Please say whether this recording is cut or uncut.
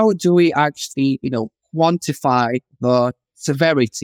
uncut